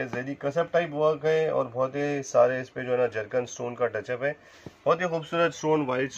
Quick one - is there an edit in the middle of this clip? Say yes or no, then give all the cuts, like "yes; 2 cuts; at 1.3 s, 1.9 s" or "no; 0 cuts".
no; 0 cuts